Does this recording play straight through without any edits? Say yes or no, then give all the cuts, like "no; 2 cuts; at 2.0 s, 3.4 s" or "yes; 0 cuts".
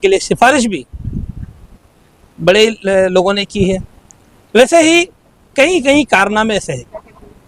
yes; 0 cuts